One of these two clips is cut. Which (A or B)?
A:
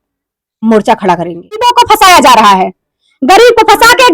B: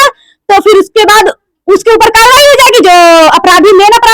A